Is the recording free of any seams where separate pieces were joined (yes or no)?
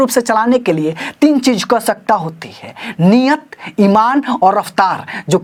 yes